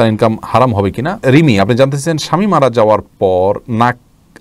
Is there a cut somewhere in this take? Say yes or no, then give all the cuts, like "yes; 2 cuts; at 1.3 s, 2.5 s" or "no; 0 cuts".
yes; 1 cut; at 1.2 s